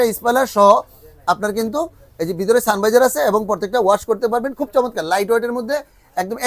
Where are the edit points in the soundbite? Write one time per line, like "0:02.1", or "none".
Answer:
none